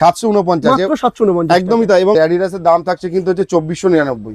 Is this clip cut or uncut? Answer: cut